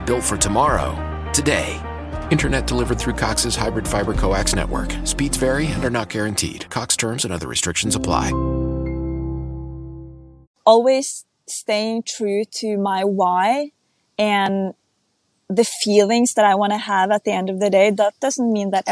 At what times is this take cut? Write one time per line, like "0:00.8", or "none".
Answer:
0:10.5

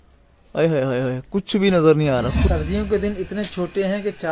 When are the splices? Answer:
0:02.8

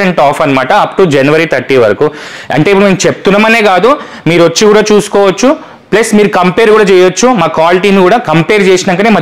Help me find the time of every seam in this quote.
none

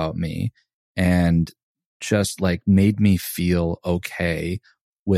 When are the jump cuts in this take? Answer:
0:01.9

